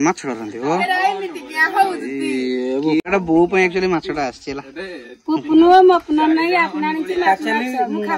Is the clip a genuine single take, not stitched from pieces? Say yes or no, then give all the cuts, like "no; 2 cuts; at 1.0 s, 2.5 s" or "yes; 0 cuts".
no; 1 cut; at 3.0 s